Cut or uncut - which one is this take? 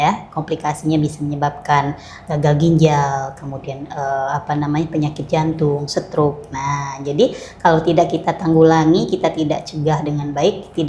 uncut